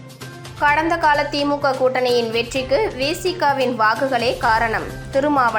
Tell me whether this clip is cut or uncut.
uncut